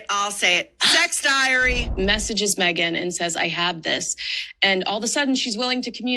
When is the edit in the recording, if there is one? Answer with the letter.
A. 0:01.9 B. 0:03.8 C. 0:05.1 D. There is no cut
A